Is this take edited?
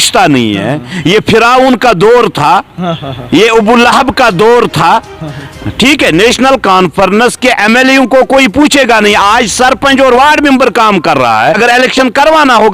yes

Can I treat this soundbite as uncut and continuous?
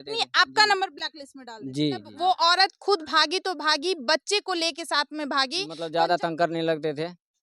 no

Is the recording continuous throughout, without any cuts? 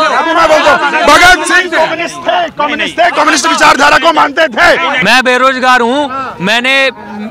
no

